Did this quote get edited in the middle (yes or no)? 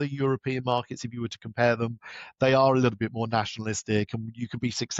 no